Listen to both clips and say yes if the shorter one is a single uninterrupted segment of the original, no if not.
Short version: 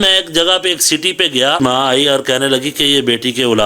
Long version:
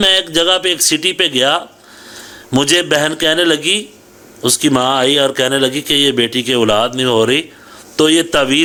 no